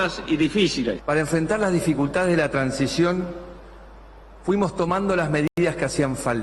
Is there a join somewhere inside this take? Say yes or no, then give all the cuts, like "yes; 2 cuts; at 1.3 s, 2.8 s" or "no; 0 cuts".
no; 0 cuts